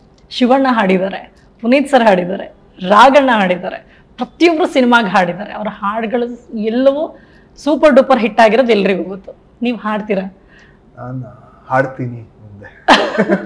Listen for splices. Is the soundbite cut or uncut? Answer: uncut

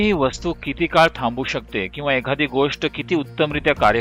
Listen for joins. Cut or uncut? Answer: uncut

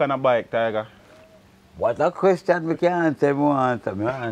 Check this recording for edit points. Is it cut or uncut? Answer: uncut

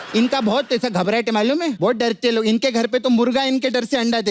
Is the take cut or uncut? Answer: cut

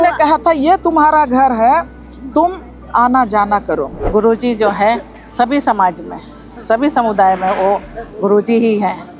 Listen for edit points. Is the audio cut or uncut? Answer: cut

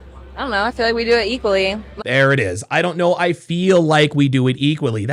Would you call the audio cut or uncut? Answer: uncut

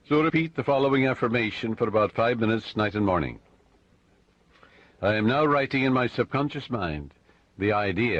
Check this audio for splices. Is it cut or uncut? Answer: uncut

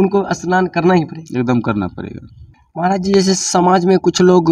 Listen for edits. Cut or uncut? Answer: cut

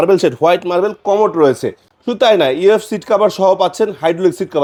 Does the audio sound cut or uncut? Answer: uncut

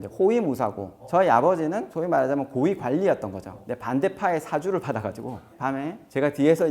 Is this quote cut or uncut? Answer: cut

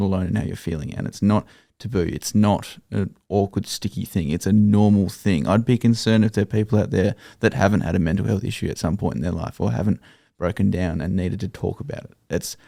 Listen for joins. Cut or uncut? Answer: uncut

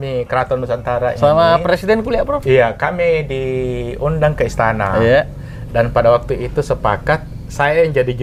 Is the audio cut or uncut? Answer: uncut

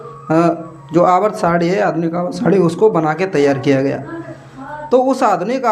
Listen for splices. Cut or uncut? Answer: uncut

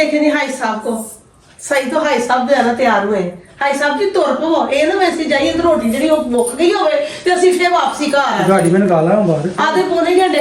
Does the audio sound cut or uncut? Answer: uncut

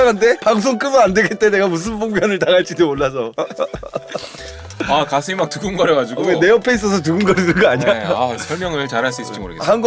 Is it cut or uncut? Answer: uncut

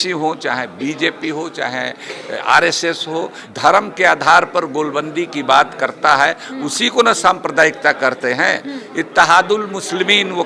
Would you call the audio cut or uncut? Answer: cut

